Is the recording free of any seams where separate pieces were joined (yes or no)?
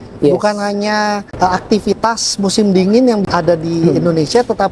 yes